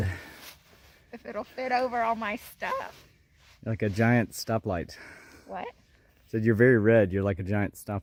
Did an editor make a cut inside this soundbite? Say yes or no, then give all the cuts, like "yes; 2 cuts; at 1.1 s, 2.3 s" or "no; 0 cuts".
no; 0 cuts